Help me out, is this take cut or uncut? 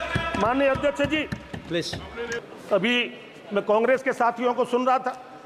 cut